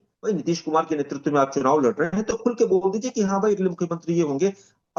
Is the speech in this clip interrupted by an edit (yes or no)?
no